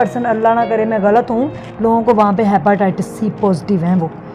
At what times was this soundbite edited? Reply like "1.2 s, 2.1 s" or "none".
none